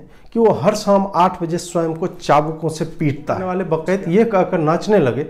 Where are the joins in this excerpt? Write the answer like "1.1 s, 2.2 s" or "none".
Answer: 3.5 s